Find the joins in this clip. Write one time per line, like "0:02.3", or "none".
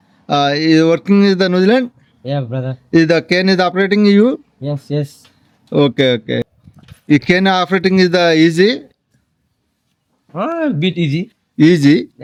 none